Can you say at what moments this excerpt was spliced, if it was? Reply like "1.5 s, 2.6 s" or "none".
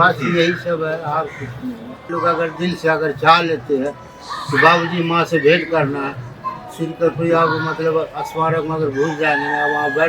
2.1 s